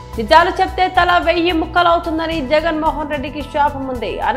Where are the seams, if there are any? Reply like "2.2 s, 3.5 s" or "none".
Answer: none